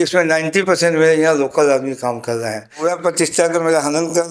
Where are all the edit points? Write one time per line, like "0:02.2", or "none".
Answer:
0:02.7